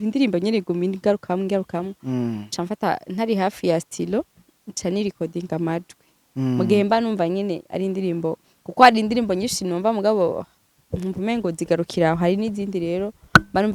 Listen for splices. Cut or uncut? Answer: uncut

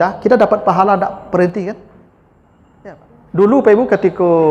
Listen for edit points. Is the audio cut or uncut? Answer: cut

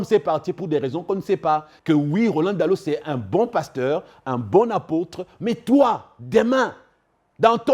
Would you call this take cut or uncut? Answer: cut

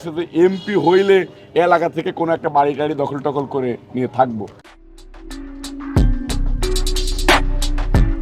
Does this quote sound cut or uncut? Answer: uncut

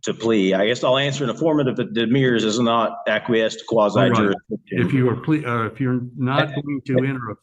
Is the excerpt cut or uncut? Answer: uncut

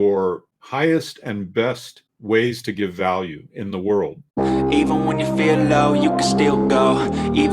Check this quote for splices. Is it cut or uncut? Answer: cut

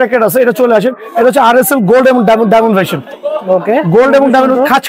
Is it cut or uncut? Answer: uncut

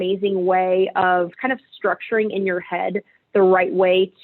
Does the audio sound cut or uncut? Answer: cut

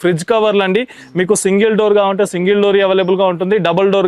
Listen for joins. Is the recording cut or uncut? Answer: uncut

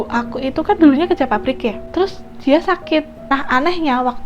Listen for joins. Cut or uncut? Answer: cut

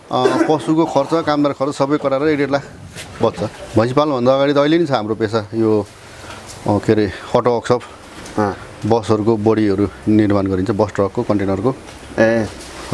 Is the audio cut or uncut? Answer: cut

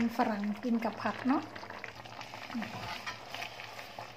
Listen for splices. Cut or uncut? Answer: cut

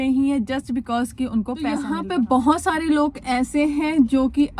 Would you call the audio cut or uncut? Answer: cut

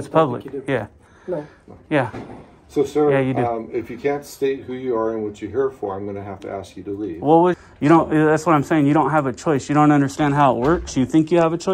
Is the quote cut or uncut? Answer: cut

